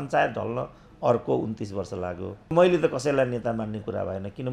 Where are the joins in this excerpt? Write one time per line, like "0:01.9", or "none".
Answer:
0:02.5